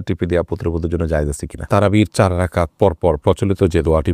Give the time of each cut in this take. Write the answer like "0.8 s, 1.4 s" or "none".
1.6 s